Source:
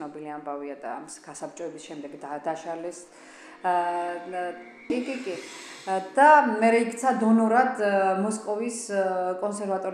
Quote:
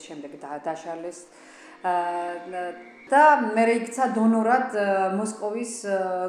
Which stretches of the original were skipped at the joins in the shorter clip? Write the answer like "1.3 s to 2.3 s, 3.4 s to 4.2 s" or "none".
4.8 s to 6.1 s